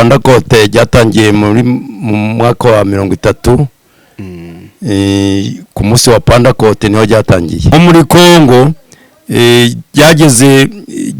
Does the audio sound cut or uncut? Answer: cut